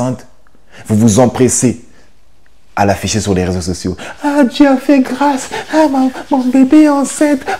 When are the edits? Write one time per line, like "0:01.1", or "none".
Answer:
none